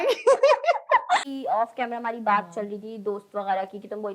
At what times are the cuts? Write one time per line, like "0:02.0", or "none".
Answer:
0:01.2